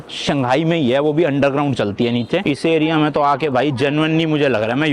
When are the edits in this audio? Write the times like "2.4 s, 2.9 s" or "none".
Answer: 2.4 s